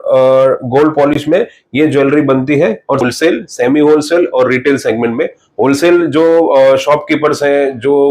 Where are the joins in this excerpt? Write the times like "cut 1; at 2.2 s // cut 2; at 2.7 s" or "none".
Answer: cut 1; at 3.0 s

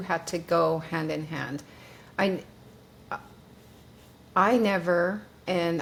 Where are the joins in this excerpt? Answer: none

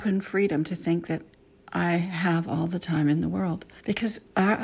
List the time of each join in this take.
cut 1; at 3.7 s

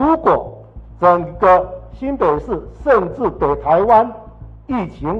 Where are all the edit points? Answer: none

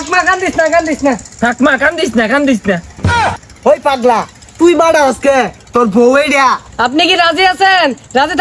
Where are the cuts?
cut 1; at 1.3 s // cut 2; at 3.4 s // cut 3; at 6.6 s

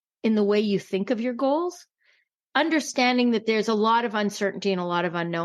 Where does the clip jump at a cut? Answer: cut 1; at 2.0 s

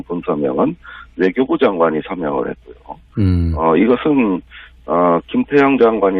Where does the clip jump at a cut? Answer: cut 1; at 1.9 s

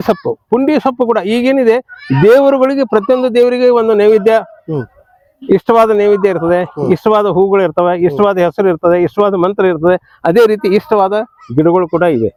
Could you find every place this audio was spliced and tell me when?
none

